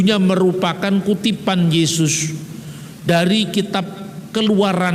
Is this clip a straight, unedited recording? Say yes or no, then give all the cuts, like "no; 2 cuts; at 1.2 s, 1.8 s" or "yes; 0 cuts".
yes; 0 cuts